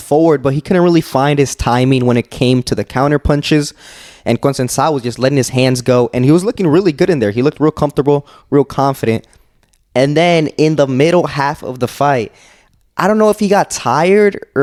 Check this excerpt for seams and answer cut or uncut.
uncut